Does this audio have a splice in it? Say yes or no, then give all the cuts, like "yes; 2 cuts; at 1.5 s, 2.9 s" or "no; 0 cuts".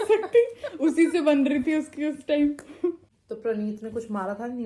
no; 0 cuts